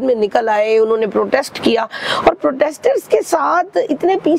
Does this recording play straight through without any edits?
yes; 0 cuts

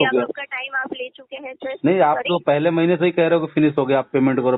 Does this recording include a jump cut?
no; 0 cuts

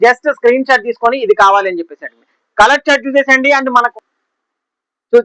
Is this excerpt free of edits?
no; 1 cut; at 3.9 s

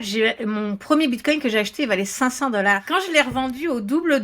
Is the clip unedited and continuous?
no; 1 cut; at 2.8 s

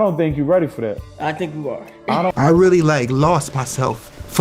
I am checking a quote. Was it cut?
yes; 1 cut; at 2.3 s

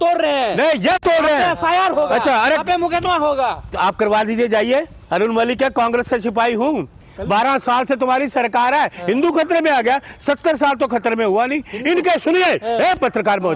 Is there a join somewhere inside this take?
yes; 1 cut; at 6.9 s

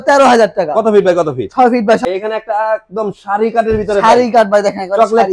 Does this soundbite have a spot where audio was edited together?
yes; 1 cut; at 2.0 s

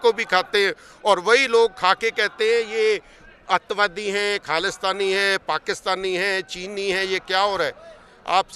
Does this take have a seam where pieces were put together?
no; 0 cuts

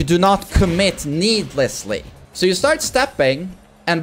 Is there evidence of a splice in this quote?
yes; 1 cut; at 2.2 s

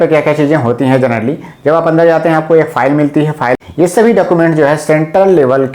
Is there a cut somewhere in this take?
yes; 1 cut; at 3.6 s

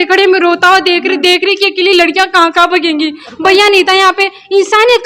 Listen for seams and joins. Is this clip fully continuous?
yes; 0 cuts

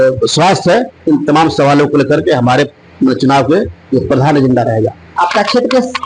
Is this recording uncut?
yes; 0 cuts

